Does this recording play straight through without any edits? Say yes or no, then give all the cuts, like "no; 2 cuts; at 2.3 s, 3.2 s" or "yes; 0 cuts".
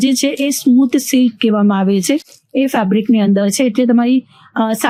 yes; 0 cuts